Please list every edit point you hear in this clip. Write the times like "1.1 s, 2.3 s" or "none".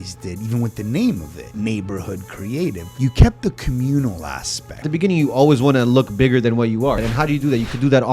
1.4 s, 2.9 s, 4.8 s, 7.1 s